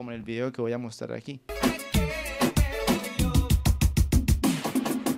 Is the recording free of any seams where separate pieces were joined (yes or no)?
no